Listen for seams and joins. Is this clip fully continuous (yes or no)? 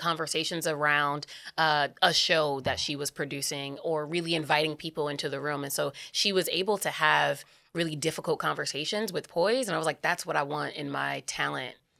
yes